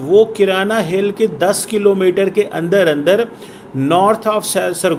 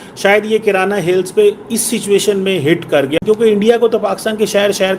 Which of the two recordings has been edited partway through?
second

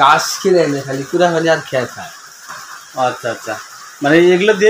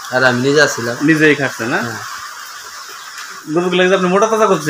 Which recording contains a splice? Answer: second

